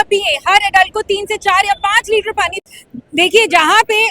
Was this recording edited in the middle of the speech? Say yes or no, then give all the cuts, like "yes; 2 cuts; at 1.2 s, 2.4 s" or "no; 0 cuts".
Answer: yes; 1 cut; at 2.6 s